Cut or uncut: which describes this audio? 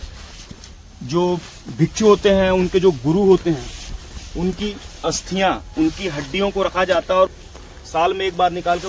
cut